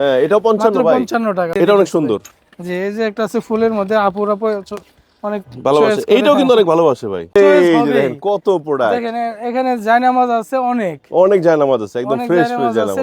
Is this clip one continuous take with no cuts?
no; 2 cuts; at 1.5 s, 7.3 s

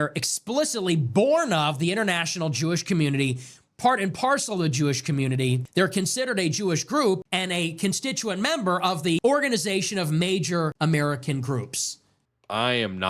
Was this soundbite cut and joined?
yes; 5 cuts; at 5.6 s, 7.3 s, 9.2 s, 10.7 s, 12.0 s

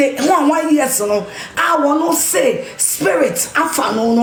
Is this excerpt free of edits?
yes; 0 cuts

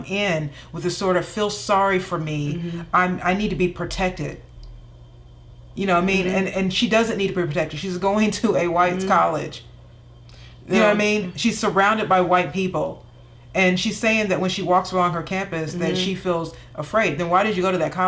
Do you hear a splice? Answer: no; 0 cuts

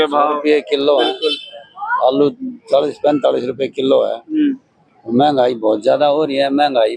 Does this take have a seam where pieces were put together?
no; 0 cuts

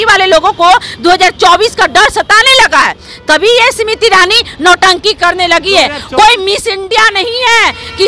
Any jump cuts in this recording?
no; 0 cuts

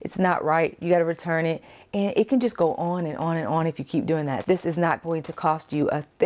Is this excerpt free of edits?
no; 1 cut; at 4.4 s

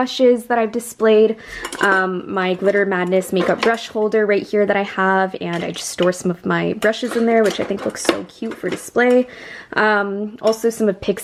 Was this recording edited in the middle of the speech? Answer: no; 0 cuts

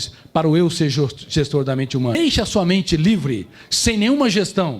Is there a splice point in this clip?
yes; 1 cut; at 2.2 s

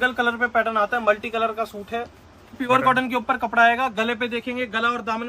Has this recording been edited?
yes; 1 cut; at 2.6 s

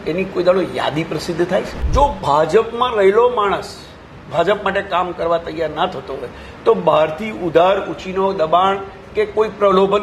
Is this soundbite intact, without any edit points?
no; 1 cut; at 1.8 s

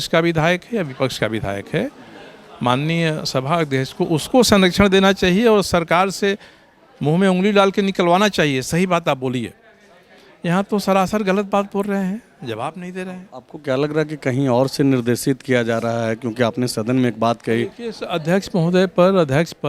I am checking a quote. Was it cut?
no; 0 cuts

